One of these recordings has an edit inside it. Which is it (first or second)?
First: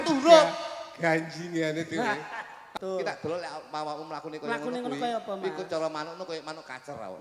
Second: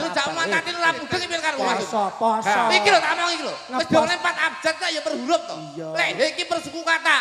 first